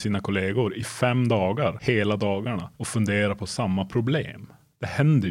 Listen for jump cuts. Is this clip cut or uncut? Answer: cut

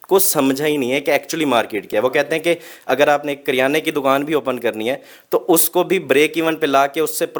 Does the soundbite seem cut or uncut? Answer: uncut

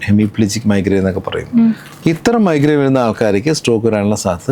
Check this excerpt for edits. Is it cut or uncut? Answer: uncut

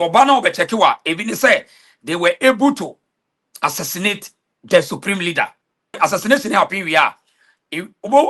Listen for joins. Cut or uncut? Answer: cut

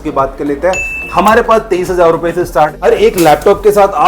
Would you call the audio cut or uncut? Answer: cut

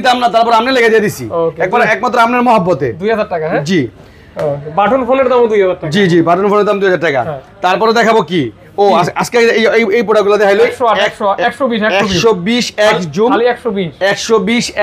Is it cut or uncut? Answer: uncut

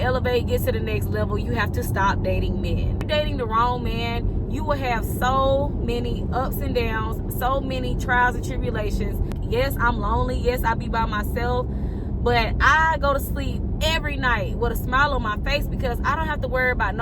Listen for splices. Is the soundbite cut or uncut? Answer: cut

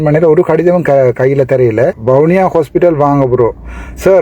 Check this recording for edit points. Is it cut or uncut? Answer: cut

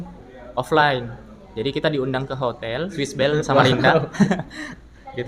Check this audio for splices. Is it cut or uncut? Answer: uncut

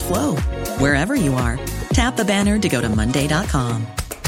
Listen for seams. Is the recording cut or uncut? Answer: uncut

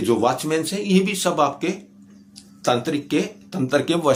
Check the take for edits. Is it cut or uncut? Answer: uncut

